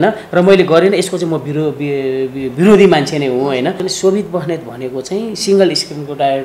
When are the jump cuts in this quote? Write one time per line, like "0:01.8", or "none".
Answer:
0:03.9